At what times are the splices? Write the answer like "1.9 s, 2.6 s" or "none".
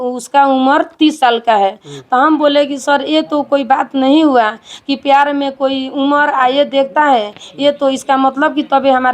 none